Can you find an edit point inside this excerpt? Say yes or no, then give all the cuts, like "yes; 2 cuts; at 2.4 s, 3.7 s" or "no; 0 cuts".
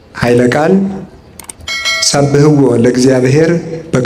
no; 0 cuts